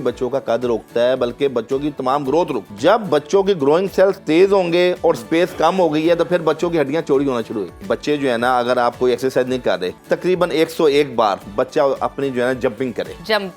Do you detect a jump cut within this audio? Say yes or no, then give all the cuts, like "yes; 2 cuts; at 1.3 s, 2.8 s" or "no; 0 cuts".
yes; 3 cuts; at 2.6 s, 7.8 s, 9.9 s